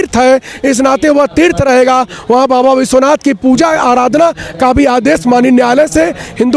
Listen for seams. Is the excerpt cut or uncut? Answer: uncut